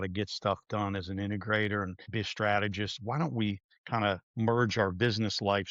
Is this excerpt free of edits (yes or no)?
no